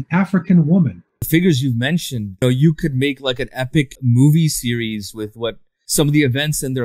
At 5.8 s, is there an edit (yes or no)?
yes